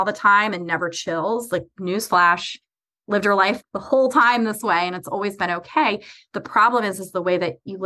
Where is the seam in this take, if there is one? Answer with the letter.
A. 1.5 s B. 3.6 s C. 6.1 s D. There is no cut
B